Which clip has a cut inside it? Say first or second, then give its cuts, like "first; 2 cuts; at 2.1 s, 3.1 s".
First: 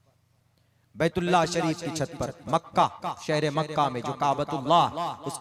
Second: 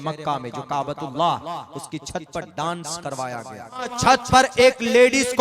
second; 1 cut; at 3.9 s